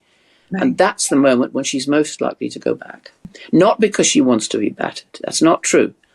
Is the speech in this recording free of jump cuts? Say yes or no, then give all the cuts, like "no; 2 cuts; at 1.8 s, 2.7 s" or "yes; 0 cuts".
no; 1 cut; at 3.3 s